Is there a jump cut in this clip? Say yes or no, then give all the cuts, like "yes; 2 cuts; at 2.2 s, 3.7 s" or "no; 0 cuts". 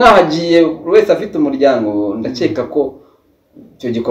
no; 0 cuts